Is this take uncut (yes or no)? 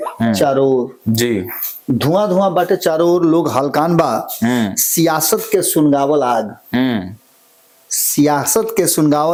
yes